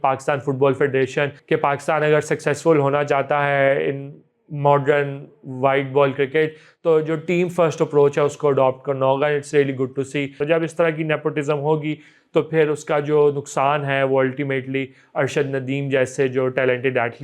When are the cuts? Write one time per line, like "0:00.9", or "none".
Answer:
0:01.4
0:10.3